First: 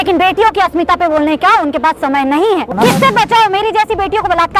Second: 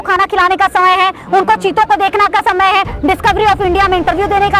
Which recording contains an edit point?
first; 1 cut; at 2.7 s

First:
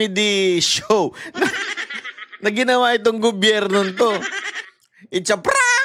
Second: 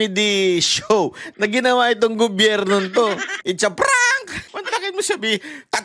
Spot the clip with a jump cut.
second; 3 cuts; at 1.2 s, 3.3 s, 4.5 s

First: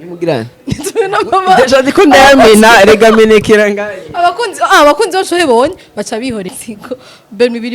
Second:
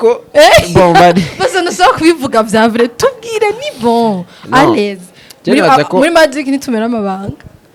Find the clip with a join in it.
first; 1 cut; at 6.5 s

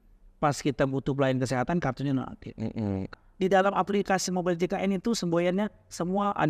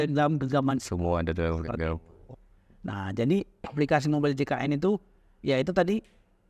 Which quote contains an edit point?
first; 1 cut; at 3.1 s

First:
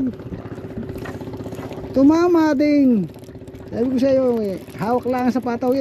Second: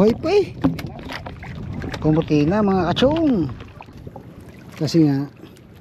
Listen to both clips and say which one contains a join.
second; 1 cut; at 4.0 s

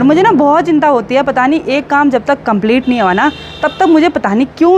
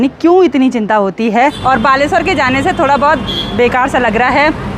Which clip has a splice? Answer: second; 1 cut; at 1.6 s

